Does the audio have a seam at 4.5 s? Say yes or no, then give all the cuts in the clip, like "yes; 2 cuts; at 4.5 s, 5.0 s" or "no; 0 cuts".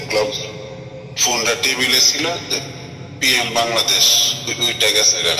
yes; 1 cut; at 4.5 s